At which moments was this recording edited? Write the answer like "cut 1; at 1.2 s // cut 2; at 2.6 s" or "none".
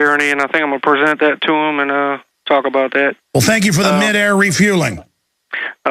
cut 1; at 3.8 s